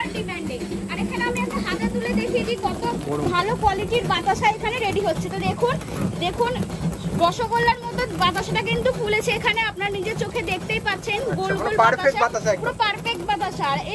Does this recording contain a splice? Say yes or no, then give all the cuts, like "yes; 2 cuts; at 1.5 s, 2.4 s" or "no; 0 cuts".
no; 0 cuts